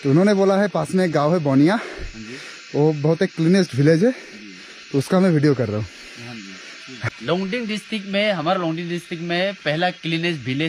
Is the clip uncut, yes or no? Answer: no